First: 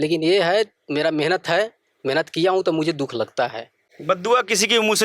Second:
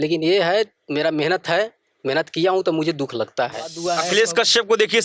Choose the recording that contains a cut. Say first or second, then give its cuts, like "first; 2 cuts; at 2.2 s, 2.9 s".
second; 1 cut; at 3.8 s